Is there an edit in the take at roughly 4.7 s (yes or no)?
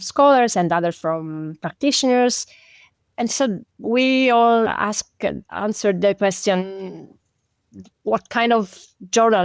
yes